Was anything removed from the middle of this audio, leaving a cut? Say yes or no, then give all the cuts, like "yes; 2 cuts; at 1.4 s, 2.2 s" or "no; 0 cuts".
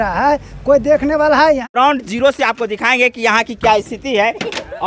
yes; 1 cut; at 1.6 s